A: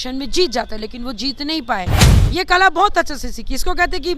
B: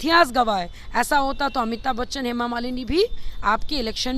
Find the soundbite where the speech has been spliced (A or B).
A